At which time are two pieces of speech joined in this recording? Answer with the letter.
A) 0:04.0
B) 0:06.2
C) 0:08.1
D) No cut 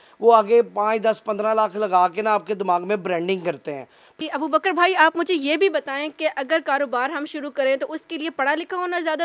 A